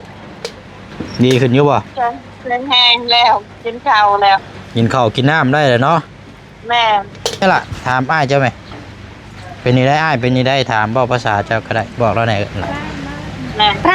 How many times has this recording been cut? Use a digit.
1